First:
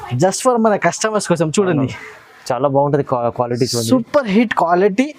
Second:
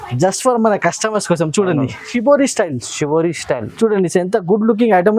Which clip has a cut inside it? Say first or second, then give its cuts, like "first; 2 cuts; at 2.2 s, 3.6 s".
second; 1 cut; at 2.1 s